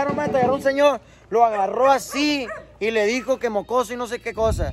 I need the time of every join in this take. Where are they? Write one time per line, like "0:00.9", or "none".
none

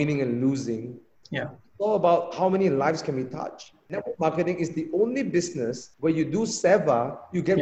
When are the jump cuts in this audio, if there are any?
0:04.0
0:05.8

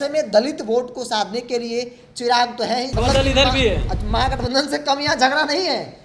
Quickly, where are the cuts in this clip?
0:02.9

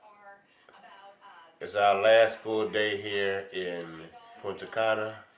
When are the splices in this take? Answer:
0:04.4

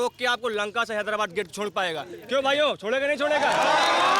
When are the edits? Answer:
none

